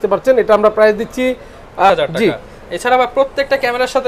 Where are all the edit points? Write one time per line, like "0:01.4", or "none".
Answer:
0:01.9